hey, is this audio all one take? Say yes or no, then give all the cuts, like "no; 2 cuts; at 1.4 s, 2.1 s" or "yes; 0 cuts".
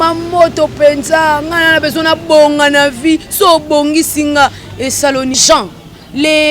no; 1 cut; at 5.4 s